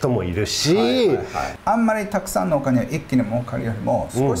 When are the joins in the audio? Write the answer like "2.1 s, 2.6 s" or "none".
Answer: 1.4 s